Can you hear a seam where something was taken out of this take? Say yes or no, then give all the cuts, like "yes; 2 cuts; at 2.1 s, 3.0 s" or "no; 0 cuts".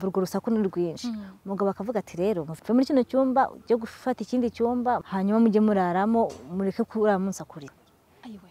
yes; 3 cuts; at 2.5 s, 5.0 s, 7.7 s